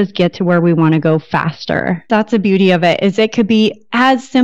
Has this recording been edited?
yes; 1 cut; at 2.1 s

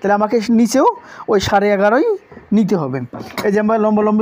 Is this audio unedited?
yes; 0 cuts

